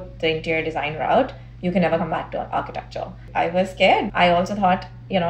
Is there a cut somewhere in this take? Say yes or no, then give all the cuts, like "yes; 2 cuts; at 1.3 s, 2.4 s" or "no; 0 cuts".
yes; 2 cuts; at 3.2 s, 4.1 s